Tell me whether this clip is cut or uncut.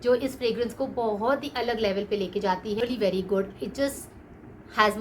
cut